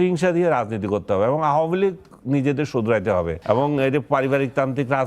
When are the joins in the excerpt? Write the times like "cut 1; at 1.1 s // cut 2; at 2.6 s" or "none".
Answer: cut 1; at 3.4 s